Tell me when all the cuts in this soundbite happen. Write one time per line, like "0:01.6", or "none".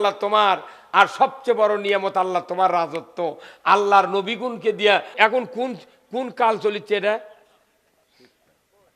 0:05.1